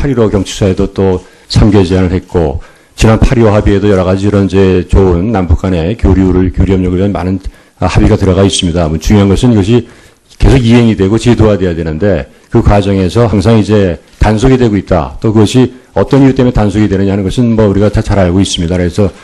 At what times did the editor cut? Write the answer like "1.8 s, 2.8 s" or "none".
none